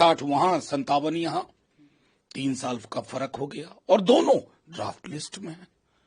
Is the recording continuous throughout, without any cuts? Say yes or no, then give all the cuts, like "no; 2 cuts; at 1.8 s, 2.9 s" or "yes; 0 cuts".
yes; 0 cuts